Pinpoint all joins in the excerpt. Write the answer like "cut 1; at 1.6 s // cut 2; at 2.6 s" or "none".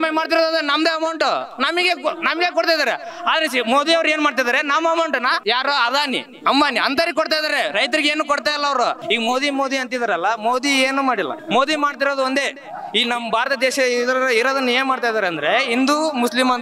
cut 1; at 5.4 s // cut 2; at 9.0 s // cut 3; at 11.4 s